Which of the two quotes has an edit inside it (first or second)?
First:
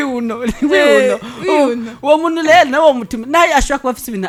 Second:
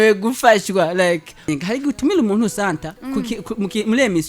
second